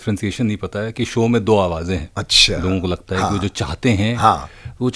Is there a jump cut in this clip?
no; 0 cuts

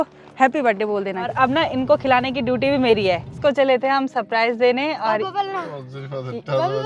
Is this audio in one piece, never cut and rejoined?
no; 2 cuts; at 1.3 s, 3.3 s

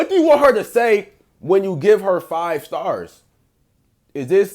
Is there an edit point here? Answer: no; 0 cuts

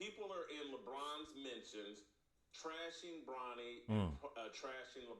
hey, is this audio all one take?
yes; 0 cuts

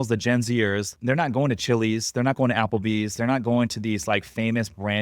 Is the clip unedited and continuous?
no; 1 cut; at 0.9 s

